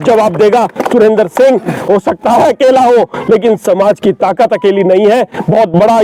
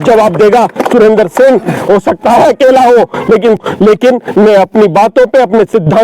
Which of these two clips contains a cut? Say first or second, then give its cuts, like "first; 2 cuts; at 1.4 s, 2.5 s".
second; 1 cut; at 3.6 s